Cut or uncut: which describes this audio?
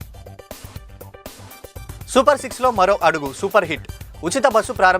cut